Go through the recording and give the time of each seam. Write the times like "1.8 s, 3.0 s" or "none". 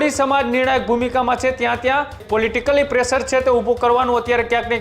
2.2 s

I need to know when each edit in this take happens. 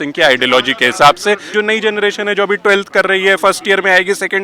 1.5 s

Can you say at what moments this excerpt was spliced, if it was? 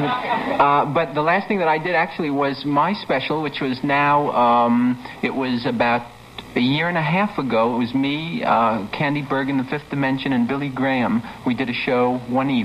none

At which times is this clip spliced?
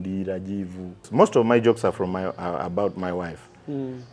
1.0 s

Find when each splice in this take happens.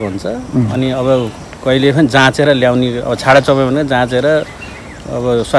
none

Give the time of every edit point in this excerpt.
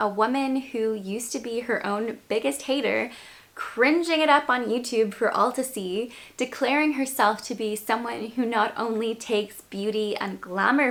none

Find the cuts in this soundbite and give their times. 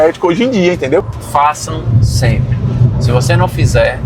1.1 s

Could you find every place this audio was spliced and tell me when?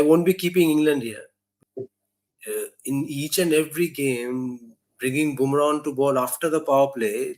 1.5 s

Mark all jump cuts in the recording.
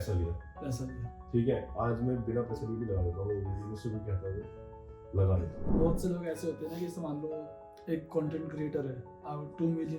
5.6 s

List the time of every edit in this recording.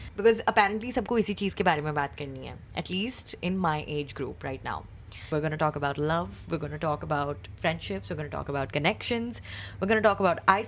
5.2 s

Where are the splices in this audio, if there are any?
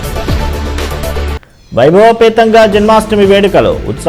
1.3 s

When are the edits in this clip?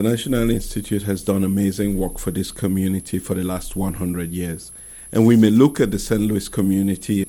none

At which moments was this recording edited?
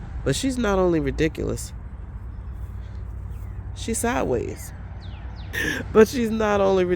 5.5 s

